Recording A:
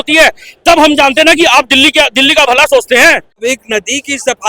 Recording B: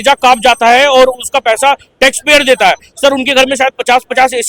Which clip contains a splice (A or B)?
A